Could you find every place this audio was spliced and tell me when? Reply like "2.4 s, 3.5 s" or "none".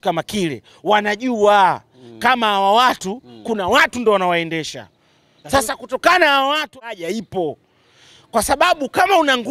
6.8 s